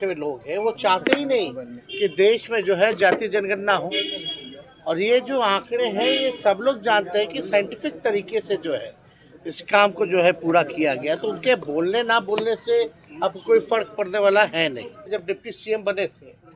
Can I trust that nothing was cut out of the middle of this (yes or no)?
no